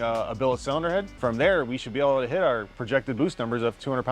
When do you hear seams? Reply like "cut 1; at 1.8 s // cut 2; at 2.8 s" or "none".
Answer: cut 1; at 1.1 s // cut 2; at 2.7 s